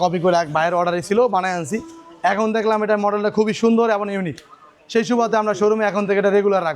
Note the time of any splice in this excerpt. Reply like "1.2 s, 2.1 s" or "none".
none